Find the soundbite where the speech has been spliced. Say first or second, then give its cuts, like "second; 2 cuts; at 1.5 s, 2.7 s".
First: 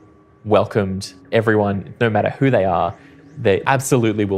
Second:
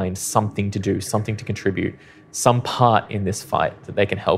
first; 2 cuts; at 1.1 s, 3.6 s